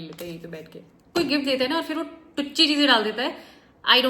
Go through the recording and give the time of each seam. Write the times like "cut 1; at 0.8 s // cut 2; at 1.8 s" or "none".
cut 1; at 1.1 s